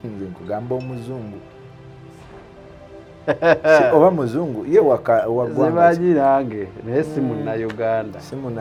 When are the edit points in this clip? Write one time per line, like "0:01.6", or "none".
none